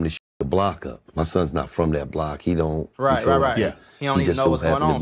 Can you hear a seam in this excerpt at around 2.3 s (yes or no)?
no